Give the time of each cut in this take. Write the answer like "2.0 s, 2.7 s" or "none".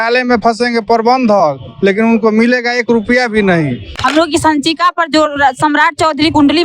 3.9 s